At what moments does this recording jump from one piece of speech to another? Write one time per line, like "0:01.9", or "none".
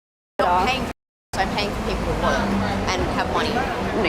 none